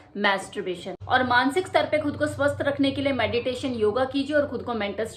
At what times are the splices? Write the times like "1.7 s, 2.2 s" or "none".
none